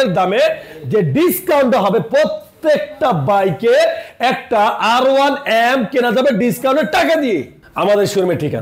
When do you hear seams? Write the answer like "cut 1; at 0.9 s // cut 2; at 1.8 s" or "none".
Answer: none